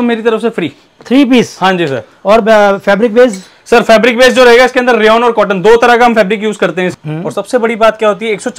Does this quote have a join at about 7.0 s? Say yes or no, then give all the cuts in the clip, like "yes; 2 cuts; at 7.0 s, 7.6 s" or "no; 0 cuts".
yes; 1 cut; at 7.0 s